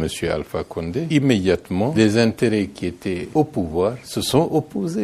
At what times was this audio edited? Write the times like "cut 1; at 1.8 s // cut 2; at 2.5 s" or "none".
cut 1; at 1.1 s // cut 2; at 1.7 s // cut 3; at 3.2 s // cut 4; at 4.1 s

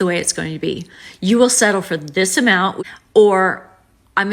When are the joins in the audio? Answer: cut 1; at 2.8 s

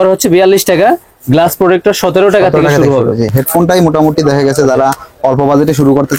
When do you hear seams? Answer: cut 1; at 3.3 s

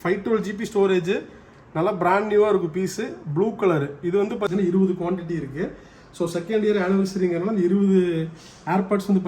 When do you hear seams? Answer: cut 1; at 4.5 s

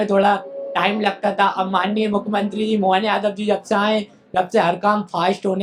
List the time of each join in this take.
none

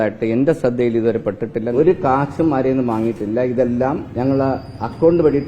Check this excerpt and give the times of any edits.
cut 1; at 1.7 s // cut 2; at 4.1 s

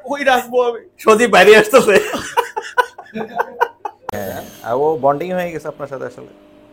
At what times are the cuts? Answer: cut 1; at 4.1 s

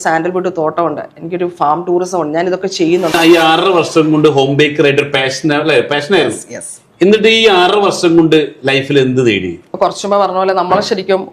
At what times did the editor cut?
cut 1; at 3.1 s // cut 2; at 9.7 s

